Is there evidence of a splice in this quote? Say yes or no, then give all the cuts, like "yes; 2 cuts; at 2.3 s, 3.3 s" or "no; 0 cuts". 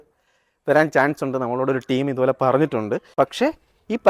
yes; 1 cut; at 3.0 s